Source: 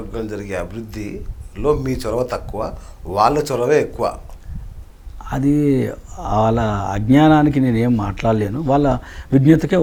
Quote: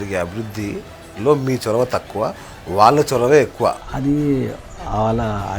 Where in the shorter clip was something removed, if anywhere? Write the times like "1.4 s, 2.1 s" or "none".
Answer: 3.9 s